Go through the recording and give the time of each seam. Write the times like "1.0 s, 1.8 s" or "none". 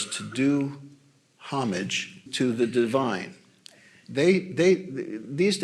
2.2 s